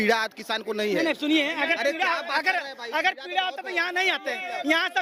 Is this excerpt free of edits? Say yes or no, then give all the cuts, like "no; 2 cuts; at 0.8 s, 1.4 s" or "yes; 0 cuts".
yes; 0 cuts